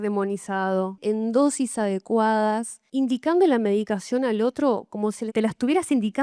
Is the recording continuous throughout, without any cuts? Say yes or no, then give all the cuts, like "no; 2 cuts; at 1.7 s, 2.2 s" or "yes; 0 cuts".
no; 3 cuts; at 1.0 s, 2.8 s, 5.2 s